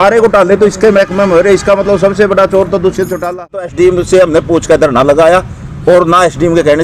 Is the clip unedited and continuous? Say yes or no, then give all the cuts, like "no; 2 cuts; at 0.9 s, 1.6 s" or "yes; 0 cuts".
no; 1 cut; at 3.6 s